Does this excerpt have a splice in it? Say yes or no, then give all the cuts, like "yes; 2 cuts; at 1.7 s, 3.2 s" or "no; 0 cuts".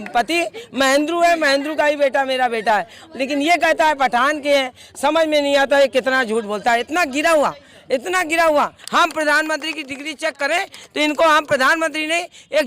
yes; 1 cut; at 8.8 s